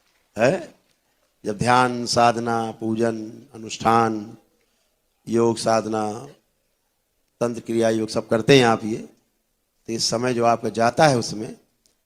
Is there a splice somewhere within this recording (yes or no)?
no